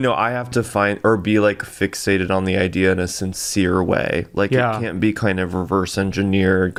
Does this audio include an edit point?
no; 0 cuts

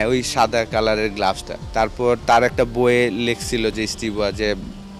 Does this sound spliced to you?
yes; 1 cut; at 1.6 s

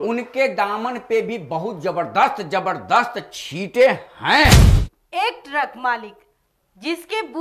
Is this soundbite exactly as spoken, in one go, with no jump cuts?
no; 1 cut; at 4.6 s

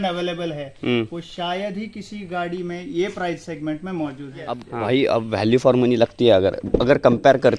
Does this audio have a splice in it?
yes; 1 cut; at 4.7 s

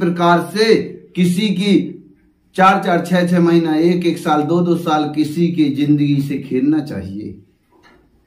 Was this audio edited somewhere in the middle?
no; 0 cuts

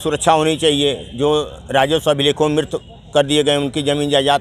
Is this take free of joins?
yes; 0 cuts

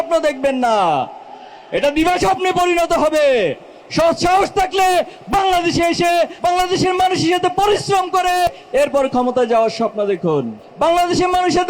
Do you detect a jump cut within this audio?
yes; 3 cuts; at 6.3 s, 8.5 s, 10.6 s

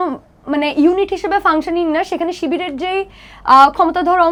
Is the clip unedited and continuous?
yes; 0 cuts

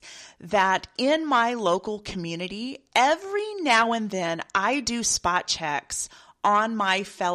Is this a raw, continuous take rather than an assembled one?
yes; 0 cuts

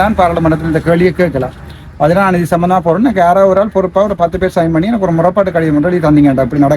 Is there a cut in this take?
no; 0 cuts

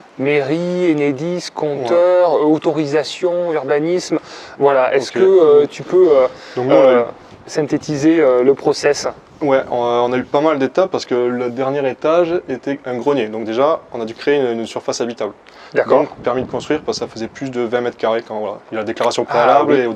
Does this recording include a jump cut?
no; 0 cuts

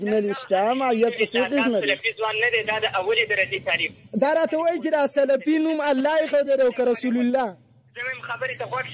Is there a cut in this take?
yes; 1 cut; at 1.9 s

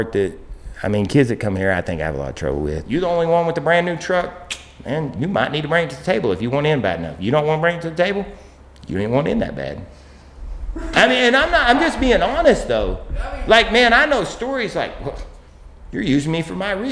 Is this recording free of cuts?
no; 1 cut; at 2.8 s

